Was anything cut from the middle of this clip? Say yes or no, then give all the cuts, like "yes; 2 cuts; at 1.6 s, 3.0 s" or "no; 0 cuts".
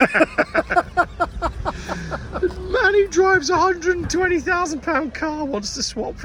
no; 0 cuts